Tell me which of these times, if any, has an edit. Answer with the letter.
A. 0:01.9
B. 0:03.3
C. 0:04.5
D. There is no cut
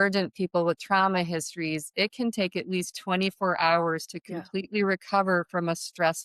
D